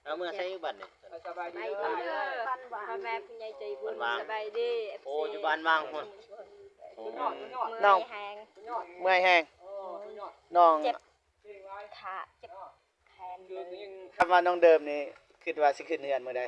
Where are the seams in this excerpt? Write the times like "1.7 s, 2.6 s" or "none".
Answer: 14.1 s